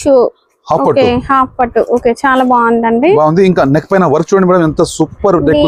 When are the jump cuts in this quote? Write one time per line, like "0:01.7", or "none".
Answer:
none